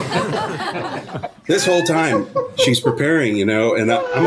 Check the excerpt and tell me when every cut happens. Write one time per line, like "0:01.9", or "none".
0:01.1

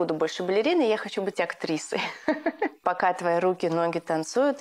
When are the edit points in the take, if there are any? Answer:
0:02.8

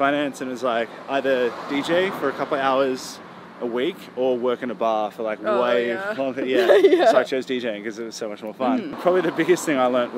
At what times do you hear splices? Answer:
0:09.0

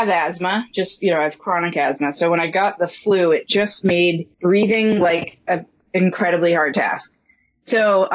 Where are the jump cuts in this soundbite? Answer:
0:04.3

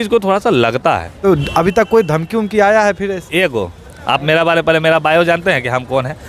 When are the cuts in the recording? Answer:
0:01.2

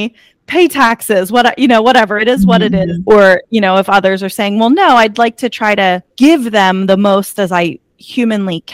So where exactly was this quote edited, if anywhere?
0:03.0
0:06.1

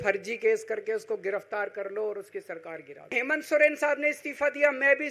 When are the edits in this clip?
0:03.1

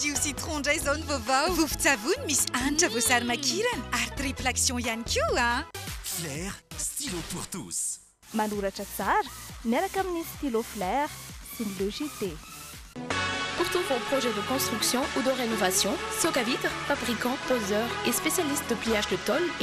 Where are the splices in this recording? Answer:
none

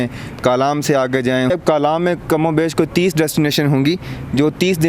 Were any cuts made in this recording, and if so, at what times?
0:01.5

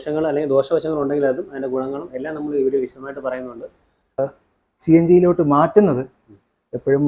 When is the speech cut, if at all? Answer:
0:04.2

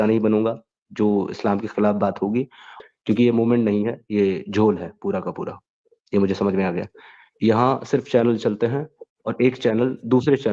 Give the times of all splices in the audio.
0:02.7

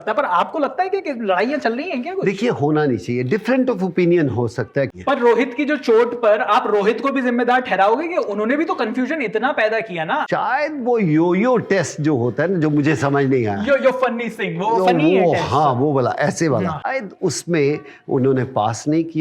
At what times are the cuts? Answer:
0:04.9
0:10.2
0:16.9

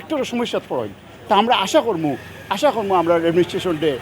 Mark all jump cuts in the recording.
none

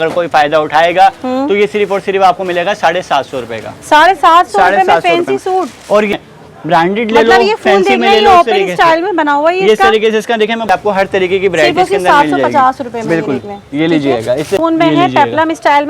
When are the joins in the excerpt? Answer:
0:06.1
0:10.7
0:14.6

